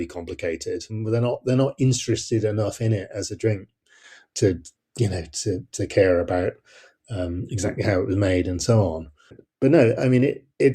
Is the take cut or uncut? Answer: cut